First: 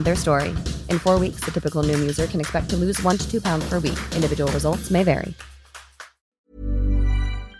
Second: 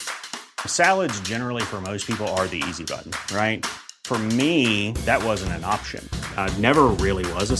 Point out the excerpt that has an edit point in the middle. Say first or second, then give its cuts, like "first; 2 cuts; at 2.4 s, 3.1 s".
first; 1 cut; at 6.4 s